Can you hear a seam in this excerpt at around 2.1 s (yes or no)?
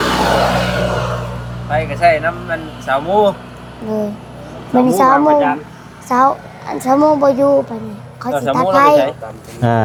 no